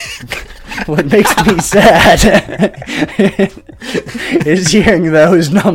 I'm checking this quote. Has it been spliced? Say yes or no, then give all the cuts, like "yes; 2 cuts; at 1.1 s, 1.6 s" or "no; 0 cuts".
no; 0 cuts